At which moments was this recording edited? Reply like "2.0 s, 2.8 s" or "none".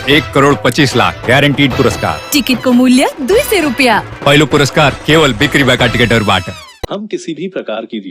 6.8 s